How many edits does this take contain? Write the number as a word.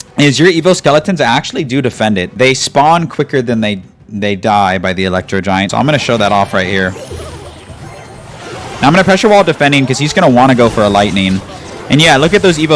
two